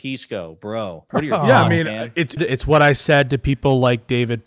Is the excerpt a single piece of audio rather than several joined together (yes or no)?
no